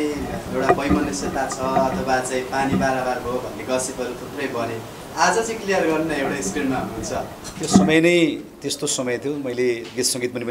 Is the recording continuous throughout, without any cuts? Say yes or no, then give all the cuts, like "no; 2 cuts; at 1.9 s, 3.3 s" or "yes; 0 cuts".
no; 1 cut; at 7.8 s